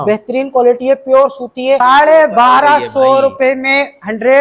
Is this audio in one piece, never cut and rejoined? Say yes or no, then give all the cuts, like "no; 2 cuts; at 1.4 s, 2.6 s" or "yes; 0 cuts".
no; 1 cut; at 1.8 s